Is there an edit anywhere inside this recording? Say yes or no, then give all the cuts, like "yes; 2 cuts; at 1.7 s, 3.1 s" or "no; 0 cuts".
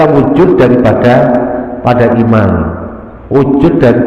no; 0 cuts